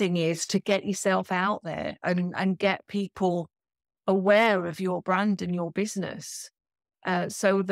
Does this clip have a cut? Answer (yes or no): no